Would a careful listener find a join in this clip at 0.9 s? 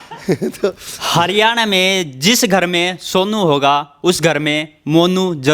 yes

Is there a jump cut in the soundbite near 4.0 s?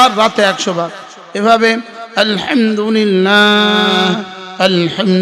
yes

